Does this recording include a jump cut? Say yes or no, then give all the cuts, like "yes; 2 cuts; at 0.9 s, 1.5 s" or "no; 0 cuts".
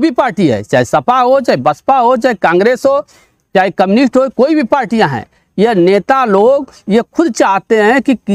no; 0 cuts